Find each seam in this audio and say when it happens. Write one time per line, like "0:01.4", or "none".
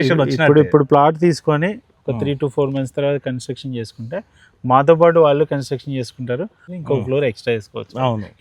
0:06.6

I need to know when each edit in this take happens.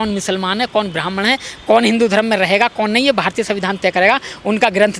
none

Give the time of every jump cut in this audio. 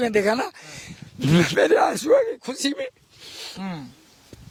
none

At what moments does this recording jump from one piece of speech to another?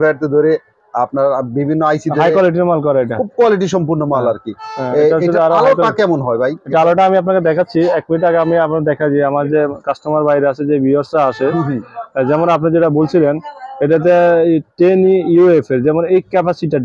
none

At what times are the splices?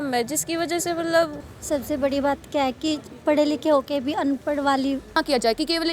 0:01.5
0:05.2

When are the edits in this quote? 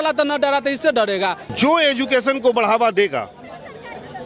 0:01.4

